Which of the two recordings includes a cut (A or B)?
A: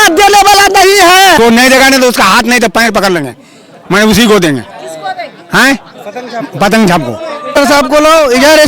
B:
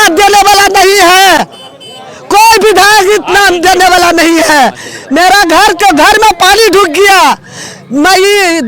A